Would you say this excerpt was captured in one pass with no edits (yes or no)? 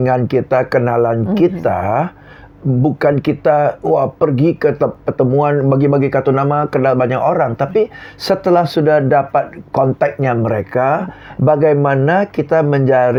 yes